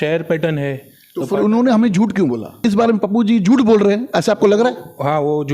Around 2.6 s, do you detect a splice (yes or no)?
yes